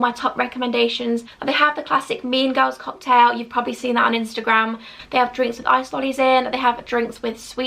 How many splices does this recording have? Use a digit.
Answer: 2